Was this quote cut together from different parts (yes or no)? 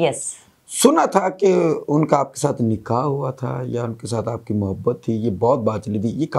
no